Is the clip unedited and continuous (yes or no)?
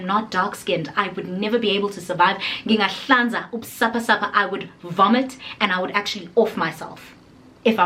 yes